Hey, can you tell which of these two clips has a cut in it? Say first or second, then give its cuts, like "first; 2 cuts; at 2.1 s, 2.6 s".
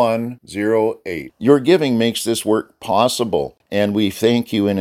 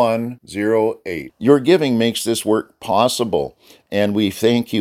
first; 1 cut; at 3.6 s